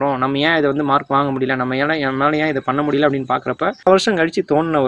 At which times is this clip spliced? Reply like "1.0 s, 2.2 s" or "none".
3.9 s